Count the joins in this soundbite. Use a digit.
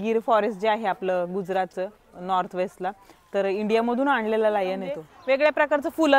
1